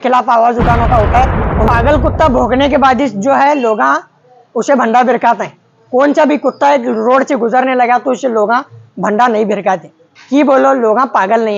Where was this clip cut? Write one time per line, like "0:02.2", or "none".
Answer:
0:01.7